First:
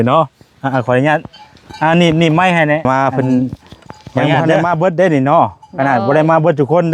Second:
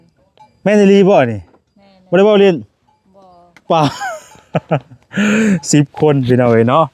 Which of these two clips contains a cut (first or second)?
first